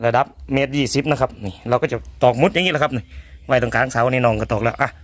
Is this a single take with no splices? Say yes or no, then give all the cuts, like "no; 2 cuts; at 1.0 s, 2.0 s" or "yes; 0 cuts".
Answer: yes; 0 cuts